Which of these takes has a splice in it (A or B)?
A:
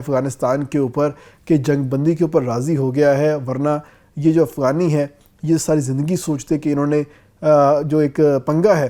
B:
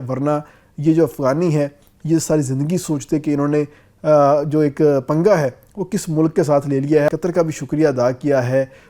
B